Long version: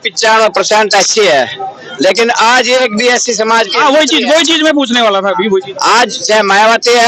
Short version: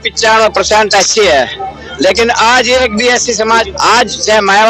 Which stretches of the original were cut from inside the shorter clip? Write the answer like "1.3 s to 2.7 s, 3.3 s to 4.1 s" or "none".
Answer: 3.7 s to 5.7 s